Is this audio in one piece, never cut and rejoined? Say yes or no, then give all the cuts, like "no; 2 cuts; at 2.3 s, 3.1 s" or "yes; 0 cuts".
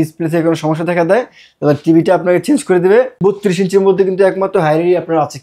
no; 1 cut; at 3.2 s